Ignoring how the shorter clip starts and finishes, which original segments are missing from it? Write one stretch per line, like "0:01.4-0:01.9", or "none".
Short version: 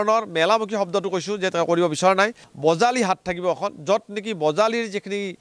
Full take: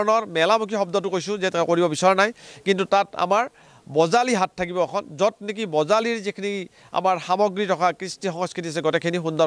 0:02.4-0:03.8